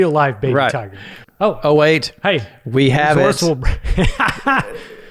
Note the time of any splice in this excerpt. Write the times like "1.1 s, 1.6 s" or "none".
1.2 s